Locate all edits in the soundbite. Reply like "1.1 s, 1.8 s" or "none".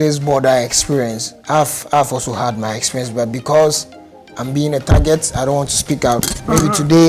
none